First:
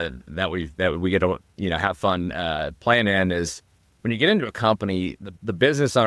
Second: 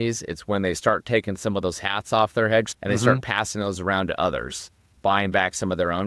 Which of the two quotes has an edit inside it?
second; 2 cuts; at 2.7 s, 4.9 s

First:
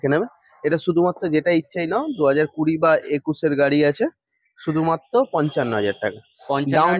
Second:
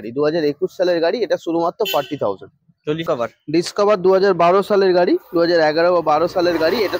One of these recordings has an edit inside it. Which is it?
second; 1 cut; at 3.0 s

